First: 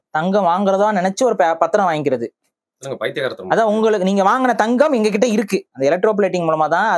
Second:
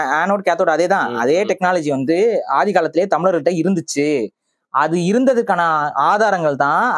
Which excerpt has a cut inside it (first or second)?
first